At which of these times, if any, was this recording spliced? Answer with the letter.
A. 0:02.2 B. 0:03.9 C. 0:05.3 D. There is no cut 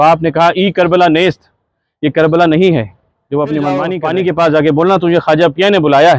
B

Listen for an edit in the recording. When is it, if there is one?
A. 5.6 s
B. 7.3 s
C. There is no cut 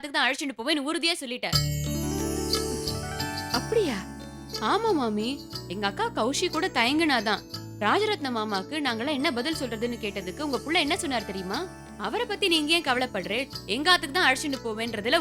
C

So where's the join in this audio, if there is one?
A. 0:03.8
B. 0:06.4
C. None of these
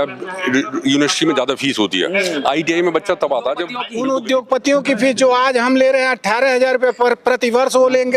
A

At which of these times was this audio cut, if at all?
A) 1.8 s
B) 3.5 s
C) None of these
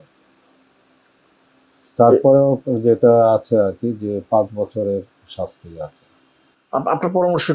C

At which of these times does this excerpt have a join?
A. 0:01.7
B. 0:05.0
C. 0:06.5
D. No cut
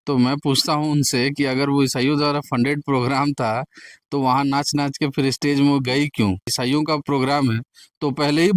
C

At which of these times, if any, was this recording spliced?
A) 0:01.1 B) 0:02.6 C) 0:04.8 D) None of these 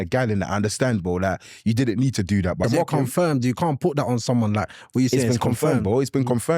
B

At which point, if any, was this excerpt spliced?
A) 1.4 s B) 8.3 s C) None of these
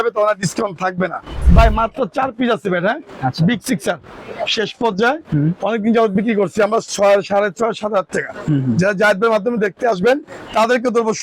A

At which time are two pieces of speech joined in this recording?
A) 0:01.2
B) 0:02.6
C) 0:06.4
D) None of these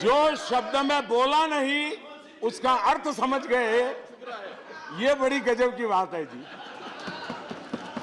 A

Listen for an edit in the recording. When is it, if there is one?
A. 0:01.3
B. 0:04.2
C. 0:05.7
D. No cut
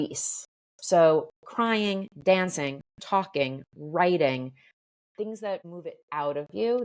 C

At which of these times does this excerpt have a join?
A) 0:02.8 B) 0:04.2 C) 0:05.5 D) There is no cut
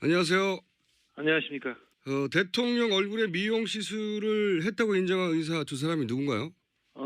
C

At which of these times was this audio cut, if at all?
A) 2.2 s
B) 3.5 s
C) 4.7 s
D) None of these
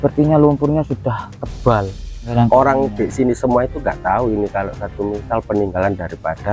A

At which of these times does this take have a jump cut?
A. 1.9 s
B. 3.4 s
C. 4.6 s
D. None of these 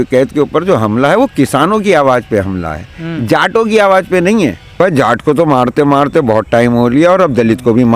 C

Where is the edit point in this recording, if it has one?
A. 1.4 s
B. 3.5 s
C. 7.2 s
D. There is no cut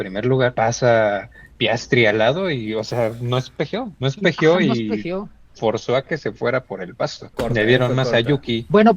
C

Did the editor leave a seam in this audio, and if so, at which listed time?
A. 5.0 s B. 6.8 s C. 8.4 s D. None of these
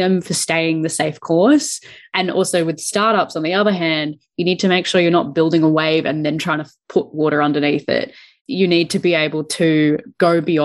C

